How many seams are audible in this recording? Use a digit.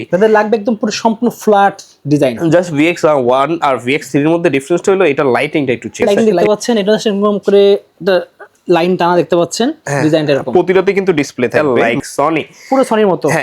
2